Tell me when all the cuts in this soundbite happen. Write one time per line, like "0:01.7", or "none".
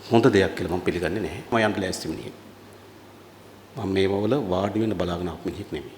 0:01.5